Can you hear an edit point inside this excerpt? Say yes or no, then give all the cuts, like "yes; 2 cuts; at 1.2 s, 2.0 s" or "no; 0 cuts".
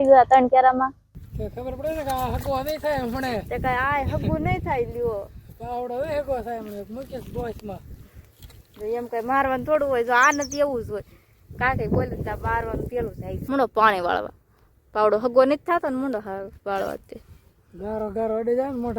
yes; 2 cuts; at 1.1 s, 13.3 s